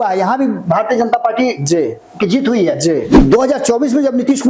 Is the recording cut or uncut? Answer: cut